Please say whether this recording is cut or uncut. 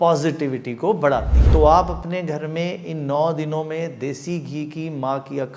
cut